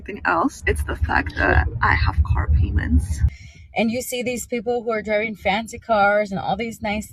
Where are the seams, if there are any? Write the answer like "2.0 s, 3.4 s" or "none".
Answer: 3.2 s